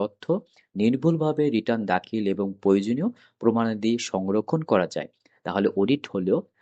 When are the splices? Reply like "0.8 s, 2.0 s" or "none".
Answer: none